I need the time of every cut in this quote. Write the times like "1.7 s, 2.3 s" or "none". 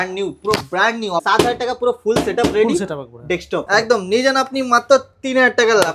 1.2 s, 3.7 s